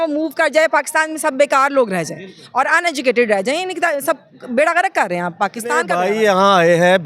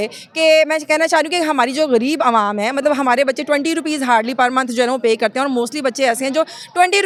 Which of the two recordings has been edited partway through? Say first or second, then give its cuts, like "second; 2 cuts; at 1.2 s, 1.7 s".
first; 1 cut; at 5.9 s